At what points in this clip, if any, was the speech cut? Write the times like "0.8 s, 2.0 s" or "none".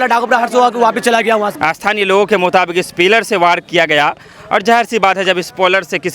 1.8 s